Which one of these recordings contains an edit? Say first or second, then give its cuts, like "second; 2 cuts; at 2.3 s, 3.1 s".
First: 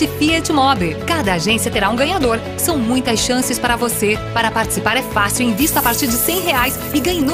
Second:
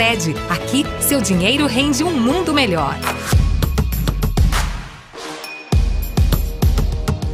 second; 1 cut; at 3.1 s